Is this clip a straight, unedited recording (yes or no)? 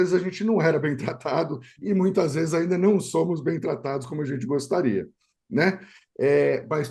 yes